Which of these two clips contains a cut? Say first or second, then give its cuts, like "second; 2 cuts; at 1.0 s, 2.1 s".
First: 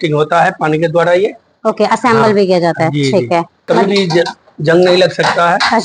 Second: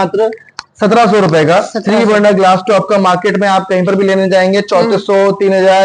first; 1 cut; at 3.5 s